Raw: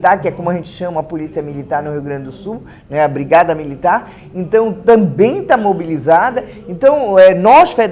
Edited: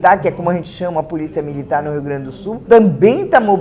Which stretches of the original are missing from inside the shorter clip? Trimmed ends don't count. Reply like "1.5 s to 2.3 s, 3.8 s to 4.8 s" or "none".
2.6 s to 4.8 s

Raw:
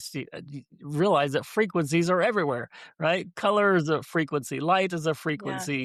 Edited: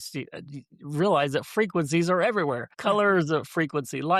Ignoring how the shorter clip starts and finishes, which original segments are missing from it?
2.7 s to 3.3 s

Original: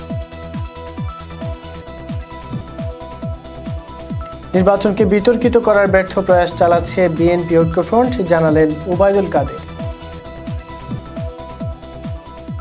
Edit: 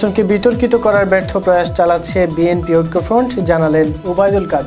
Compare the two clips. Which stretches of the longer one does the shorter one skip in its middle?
none

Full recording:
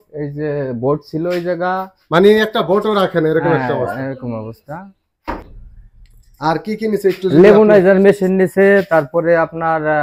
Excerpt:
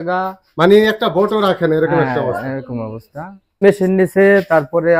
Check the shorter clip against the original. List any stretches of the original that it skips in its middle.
5.2 s to 8.0 s

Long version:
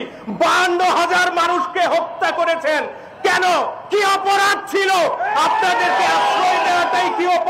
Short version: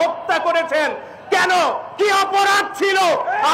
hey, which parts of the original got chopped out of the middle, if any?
none

